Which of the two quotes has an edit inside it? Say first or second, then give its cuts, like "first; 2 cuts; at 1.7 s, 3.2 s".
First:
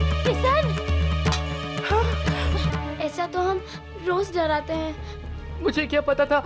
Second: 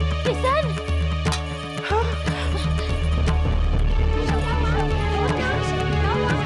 first; 1 cut; at 2.7 s